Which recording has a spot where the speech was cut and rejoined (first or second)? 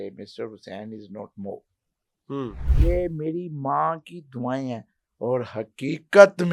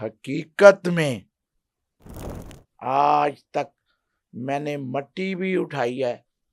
first